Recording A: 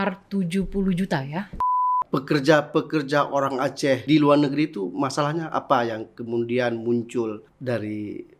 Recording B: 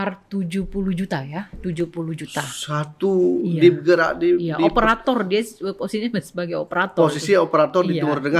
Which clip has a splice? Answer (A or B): A